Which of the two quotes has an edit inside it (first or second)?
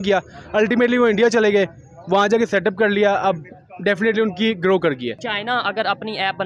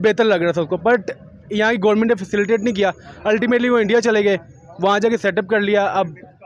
first